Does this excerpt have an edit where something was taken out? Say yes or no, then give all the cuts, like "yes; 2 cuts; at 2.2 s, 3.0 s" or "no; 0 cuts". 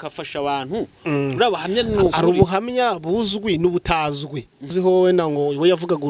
yes; 1 cut; at 4.7 s